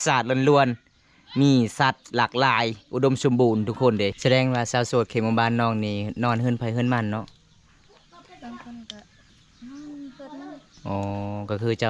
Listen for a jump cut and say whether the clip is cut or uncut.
cut